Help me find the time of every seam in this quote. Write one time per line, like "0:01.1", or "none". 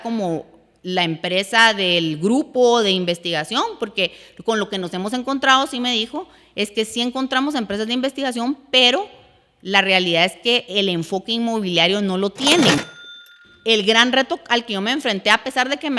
0:13.2